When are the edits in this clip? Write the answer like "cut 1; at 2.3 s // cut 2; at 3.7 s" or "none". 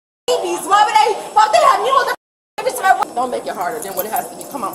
cut 1; at 3.0 s